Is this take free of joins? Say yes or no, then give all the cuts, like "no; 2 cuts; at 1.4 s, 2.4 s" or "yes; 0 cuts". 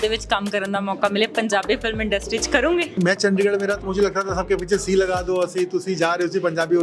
no; 1 cut; at 3.0 s